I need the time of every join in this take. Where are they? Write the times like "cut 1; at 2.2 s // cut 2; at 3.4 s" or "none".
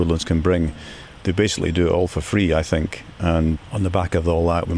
cut 1; at 1.2 s // cut 2; at 3.6 s

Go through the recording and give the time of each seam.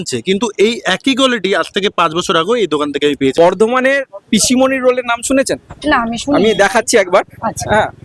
cut 1; at 3.3 s

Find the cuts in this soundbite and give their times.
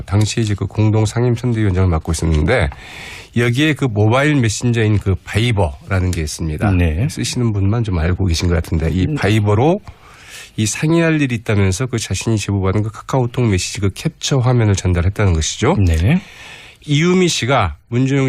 none

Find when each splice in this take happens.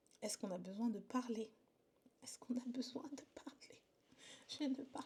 none

